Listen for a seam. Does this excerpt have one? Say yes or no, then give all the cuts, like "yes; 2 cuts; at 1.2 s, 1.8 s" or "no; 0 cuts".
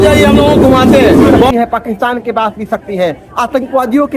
yes; 1 cut; at 1.5 s